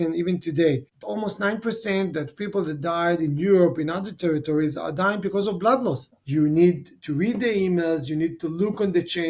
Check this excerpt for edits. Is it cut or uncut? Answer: cut